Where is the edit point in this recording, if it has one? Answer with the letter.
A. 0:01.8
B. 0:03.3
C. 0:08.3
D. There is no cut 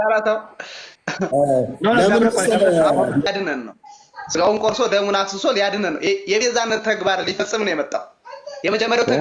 B